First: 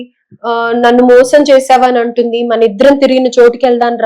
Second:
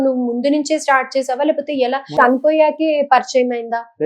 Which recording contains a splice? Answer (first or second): second